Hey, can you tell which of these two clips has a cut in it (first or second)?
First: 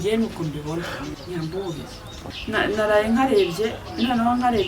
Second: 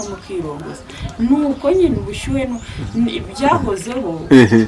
first